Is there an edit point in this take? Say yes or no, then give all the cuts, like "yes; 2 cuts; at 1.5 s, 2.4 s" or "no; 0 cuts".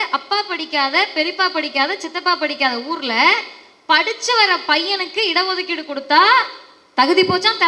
no; 0 cuts